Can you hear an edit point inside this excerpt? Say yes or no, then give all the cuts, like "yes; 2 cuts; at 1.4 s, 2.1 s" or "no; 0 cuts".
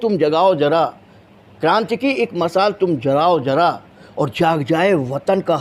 no; 0 cuts